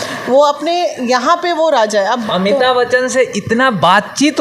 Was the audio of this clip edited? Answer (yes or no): yes